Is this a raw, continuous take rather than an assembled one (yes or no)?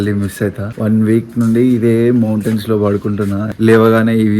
yes